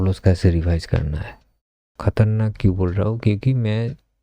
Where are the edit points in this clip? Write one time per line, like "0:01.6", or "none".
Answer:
0:01.9

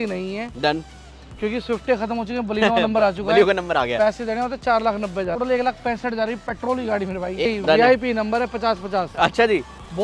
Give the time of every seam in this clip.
0:05.4
0:07.5

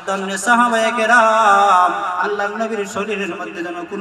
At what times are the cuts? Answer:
0:02.2

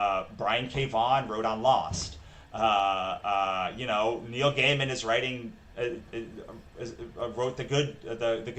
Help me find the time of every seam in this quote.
none

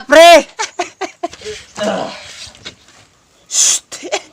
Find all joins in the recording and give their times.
0:01.4

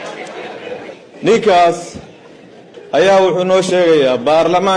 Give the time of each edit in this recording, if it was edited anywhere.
0:01.0

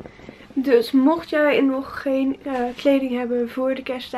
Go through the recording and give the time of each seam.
none

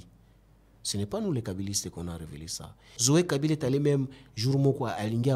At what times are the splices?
0:03.0

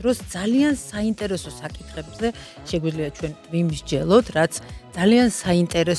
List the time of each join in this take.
none

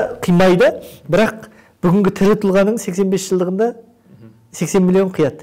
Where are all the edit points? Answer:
none

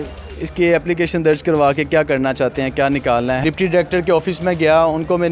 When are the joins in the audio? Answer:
0:03.4

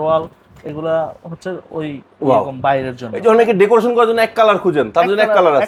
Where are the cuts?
none

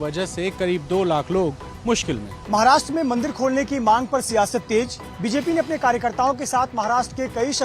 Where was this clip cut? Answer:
0:02.3

